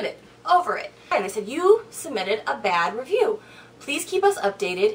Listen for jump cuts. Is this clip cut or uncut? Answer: cut